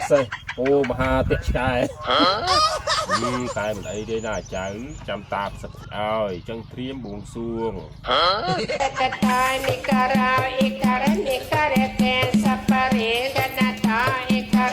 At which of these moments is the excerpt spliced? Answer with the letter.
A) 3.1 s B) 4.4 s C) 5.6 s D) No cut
A